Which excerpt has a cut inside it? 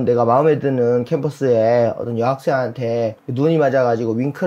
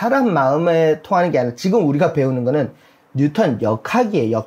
first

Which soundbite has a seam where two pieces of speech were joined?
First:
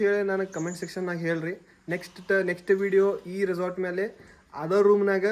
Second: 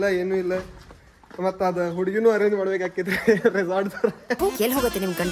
second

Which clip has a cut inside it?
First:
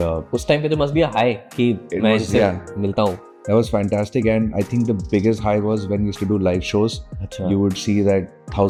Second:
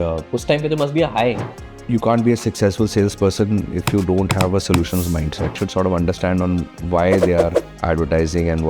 second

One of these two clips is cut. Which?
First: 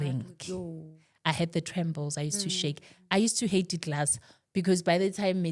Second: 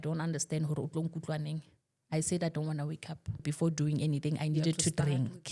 second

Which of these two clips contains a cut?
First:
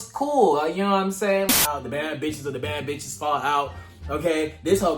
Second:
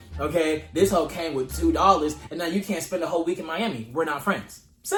first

